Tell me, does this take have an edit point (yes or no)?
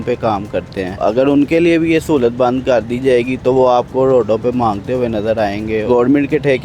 yes